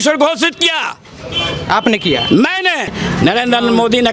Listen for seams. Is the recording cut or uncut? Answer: cut